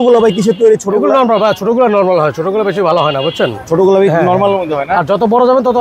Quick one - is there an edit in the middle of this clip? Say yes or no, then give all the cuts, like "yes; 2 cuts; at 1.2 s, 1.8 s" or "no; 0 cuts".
no; 0 cuts